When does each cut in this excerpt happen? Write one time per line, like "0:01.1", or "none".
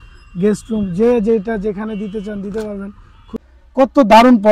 0:03.1